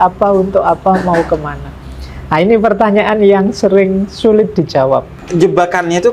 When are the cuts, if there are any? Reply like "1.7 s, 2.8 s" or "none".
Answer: 5.2 s